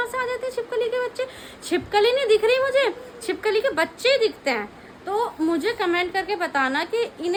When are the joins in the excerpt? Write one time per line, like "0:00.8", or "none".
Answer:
none